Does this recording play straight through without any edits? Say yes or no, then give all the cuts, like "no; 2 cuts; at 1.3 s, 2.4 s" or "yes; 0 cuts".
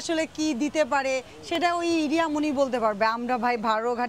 yes; 0 cuts